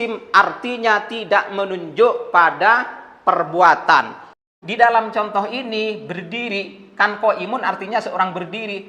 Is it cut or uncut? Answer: cut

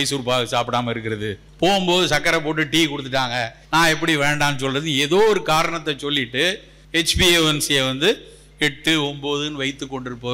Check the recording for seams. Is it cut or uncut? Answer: cut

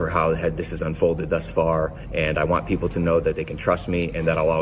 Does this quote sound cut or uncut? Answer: uncut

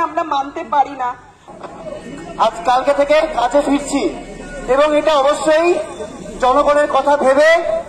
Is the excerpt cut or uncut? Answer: cut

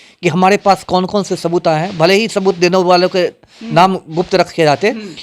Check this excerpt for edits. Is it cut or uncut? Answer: uncut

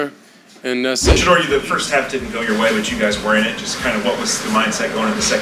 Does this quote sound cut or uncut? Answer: cut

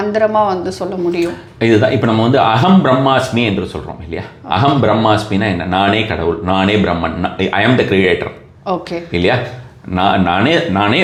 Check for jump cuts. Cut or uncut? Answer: uncut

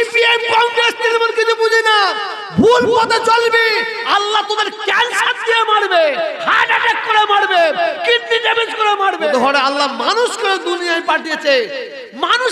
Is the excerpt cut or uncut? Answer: cut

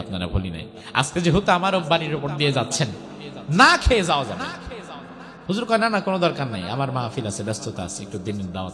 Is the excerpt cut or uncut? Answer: uncut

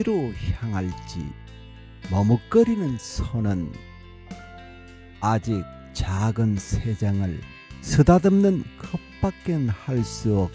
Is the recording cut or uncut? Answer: cut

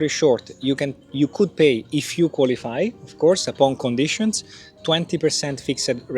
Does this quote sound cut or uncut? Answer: uncut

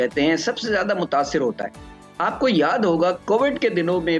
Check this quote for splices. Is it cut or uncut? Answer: uncut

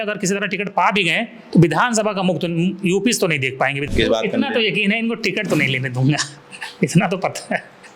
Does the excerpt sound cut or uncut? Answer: cut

